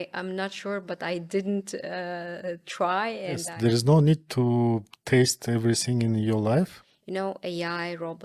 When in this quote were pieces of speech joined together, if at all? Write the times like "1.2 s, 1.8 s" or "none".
3.5 s, 6.9 s